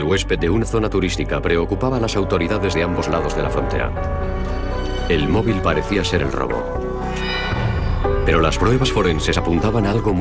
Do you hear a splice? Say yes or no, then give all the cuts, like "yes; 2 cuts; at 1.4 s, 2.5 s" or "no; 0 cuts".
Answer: no; 0 cuts